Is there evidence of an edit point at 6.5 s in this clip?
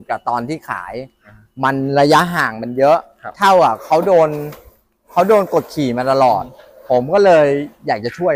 no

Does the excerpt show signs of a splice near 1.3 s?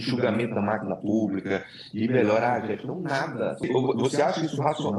no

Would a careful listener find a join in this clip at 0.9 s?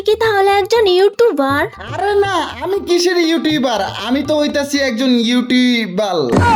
no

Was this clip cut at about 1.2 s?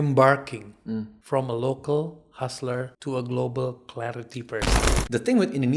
yes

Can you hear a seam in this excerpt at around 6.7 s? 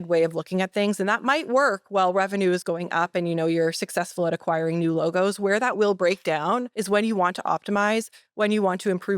yes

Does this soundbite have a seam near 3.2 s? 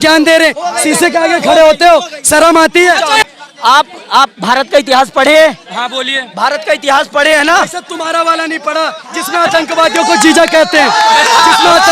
yes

